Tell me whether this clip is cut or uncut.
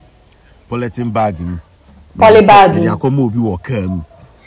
uncut